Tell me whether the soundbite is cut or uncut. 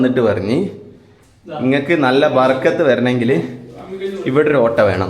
uncut